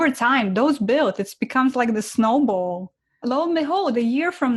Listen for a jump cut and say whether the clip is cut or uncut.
uncut